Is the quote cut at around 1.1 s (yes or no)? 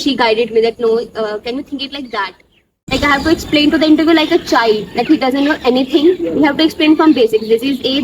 no